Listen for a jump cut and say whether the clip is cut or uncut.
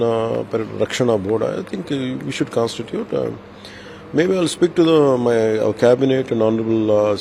uncut